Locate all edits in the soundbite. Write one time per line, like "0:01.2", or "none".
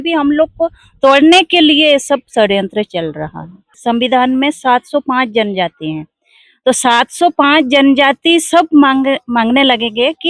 0:03.7

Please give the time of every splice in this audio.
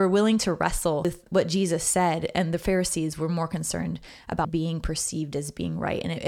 0:01.1
0:04.4

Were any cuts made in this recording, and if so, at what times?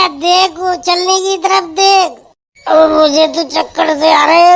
none

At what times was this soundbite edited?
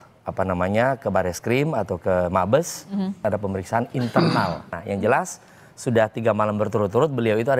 0:03.2
0:04.8

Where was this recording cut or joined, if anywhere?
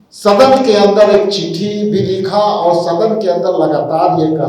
none

